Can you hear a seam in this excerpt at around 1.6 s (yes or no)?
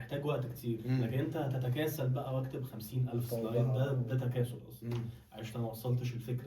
no